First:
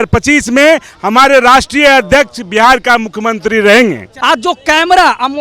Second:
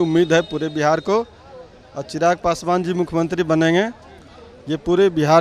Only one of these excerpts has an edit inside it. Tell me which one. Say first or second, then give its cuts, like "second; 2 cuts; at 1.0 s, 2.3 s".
first; 1 cut; at 4.1 s